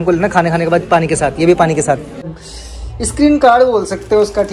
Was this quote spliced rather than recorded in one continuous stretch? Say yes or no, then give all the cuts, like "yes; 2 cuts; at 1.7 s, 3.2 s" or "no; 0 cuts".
yes; 1 cut; at 2.3 s